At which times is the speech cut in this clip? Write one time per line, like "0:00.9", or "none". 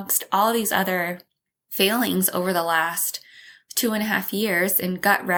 none